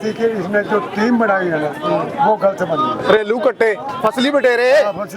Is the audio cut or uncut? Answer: cut